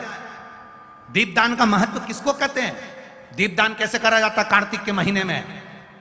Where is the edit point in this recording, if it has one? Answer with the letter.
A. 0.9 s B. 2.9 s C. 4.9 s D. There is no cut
D